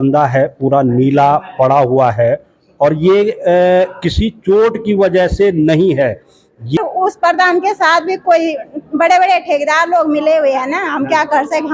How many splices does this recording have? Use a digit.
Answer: 1